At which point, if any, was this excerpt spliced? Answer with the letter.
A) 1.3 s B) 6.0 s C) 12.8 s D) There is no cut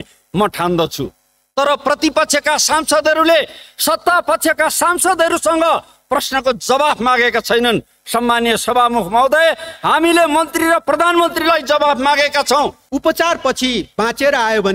C